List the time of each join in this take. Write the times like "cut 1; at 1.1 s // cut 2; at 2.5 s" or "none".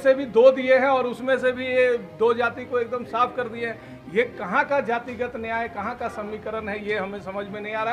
none